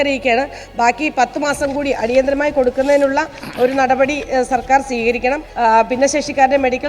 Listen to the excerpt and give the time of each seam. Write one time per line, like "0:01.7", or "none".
0:05.5